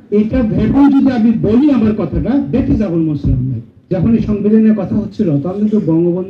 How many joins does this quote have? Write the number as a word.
one